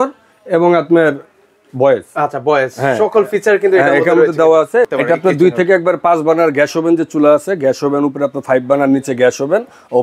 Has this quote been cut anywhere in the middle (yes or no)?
yes